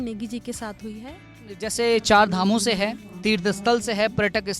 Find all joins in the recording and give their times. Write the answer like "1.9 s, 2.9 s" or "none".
1.6 s